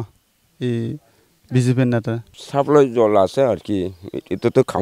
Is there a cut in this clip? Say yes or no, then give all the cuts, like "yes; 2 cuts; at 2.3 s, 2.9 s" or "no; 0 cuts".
yes; 1 cut; at 2.3 s